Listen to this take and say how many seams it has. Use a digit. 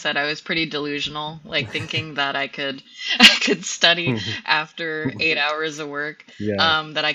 0